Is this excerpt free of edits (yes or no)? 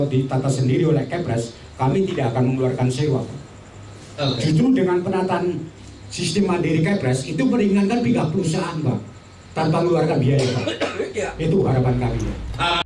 yes